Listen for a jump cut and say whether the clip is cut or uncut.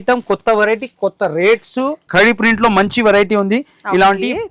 cut